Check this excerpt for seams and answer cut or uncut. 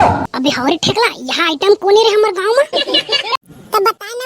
cut